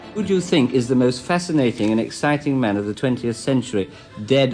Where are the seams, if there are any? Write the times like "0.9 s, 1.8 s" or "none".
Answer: none